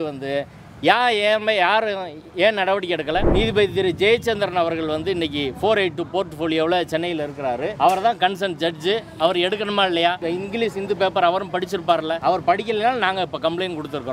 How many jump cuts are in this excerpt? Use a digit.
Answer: 4